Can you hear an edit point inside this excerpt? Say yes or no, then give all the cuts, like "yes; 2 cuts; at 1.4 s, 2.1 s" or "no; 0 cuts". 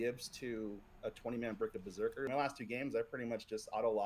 yes; 1 cut; at 2.3 s